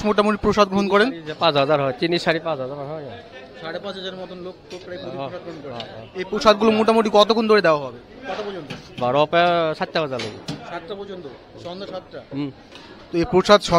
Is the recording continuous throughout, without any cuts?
yes; 0 cuts

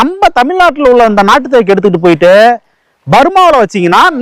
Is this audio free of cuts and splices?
yes; 0 cuts

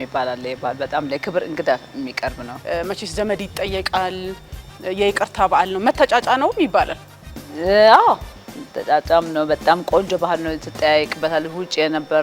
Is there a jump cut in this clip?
yes; 1 cut; at 2.6 s

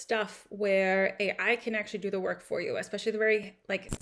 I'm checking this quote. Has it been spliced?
no; 0 cuts

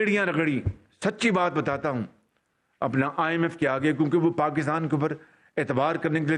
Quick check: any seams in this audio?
no; 0 cuts

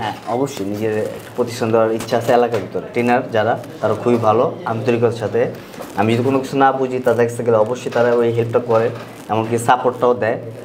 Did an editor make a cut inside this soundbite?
yes; 1 cut; at 2.8 s

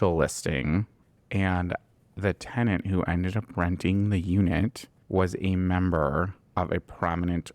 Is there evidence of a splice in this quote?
yes; 1 cut; at 1.0 s

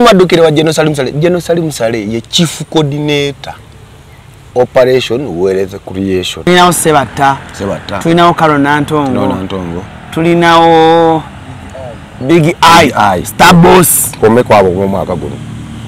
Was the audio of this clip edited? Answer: yes; 1 cut; at 6.5 s

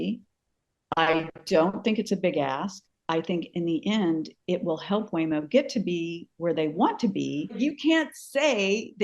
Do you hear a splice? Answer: yes; 1 cut; at 7.6 s

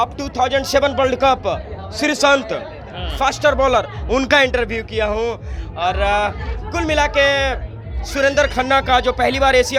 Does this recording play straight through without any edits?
yes; 0 cuts

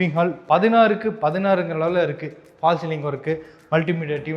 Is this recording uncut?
yes; 0 cuts

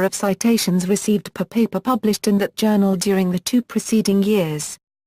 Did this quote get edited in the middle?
yes; 1 cut; at 1.3 s

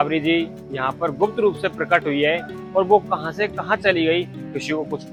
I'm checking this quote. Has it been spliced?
no; 0 cuts

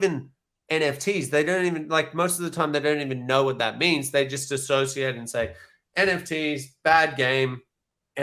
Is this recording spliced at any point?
no; 0 cuts

